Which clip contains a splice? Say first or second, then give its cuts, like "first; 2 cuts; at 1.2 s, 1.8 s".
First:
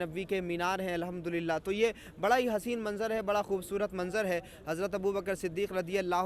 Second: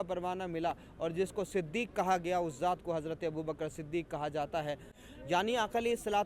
second; 1 cut; at 4.9 s